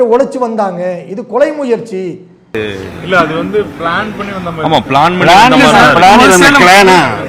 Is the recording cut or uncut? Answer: uncut